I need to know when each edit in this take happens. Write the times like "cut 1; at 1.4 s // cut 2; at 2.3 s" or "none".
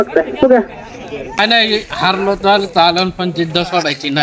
cut 1; at 1.4 s